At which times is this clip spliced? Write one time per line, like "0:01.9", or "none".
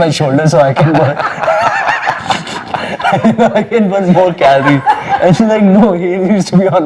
none